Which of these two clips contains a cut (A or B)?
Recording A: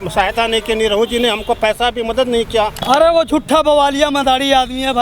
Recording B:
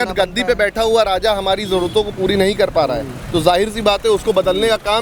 A